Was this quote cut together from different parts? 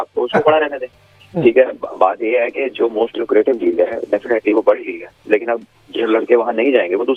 no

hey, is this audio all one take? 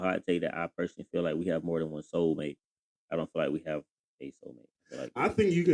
yes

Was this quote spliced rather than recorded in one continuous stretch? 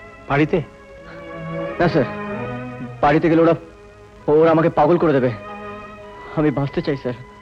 no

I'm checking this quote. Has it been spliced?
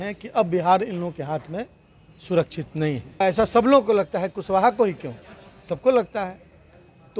yes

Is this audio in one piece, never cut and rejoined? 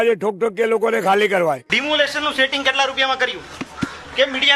no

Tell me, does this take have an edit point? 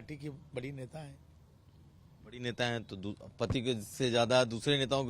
no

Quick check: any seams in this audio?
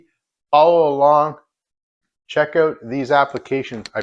no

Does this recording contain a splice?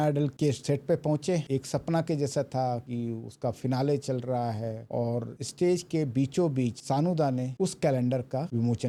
no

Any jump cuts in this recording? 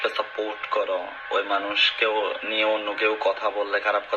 yes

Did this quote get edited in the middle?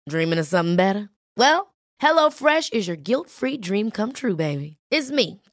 no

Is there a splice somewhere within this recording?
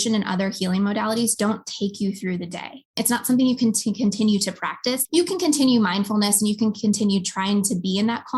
yes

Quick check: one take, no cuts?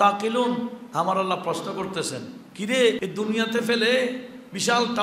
no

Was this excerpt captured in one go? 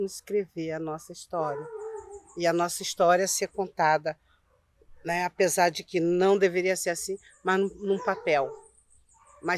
yes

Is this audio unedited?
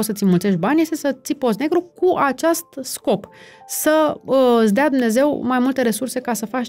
yes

